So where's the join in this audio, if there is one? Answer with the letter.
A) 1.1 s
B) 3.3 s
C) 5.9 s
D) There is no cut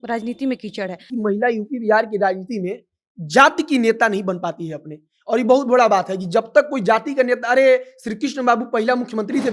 A